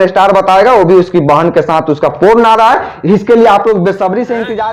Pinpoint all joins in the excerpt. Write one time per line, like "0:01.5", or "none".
none